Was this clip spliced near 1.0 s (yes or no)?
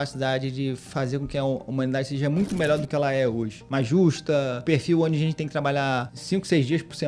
no